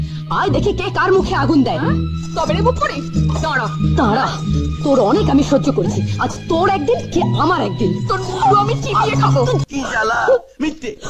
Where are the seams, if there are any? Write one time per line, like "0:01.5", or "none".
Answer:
0:09.7